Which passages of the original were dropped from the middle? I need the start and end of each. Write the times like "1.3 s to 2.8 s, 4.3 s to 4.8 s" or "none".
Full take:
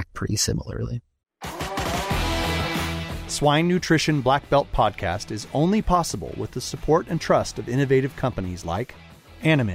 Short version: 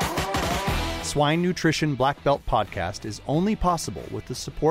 2.4 s to 3.2 s

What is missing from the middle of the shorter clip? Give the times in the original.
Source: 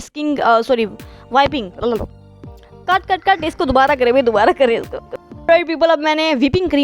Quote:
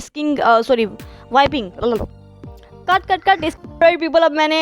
3.5 s to 5.2 s

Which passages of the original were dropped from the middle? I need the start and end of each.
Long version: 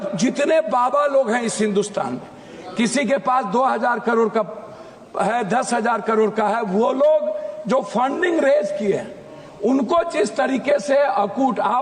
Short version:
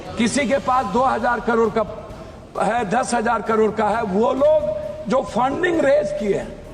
none

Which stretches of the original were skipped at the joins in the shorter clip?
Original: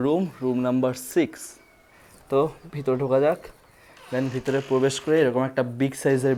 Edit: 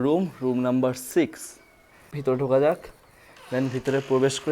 2.1 s to 2.7 s

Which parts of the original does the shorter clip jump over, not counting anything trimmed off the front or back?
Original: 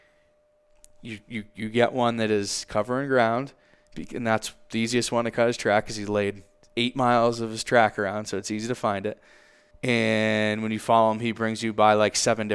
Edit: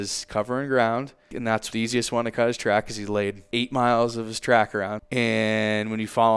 4.0 s to 4.6 s, 6.4 s to 6.7 s, 8.2 s to 9.7 s

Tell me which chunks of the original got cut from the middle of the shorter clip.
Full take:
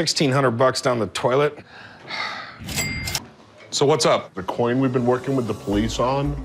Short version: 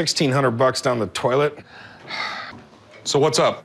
2.6 s to 3.2 s

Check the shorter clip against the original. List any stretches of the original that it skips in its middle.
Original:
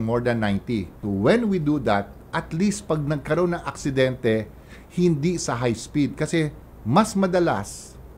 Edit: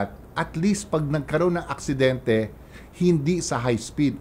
none

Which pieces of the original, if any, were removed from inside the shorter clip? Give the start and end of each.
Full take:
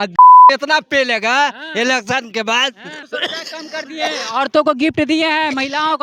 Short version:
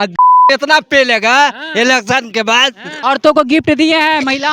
2.9 s to 4.3 s

